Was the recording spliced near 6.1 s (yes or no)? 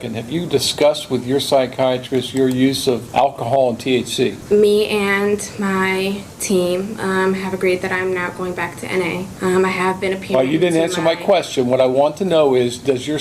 no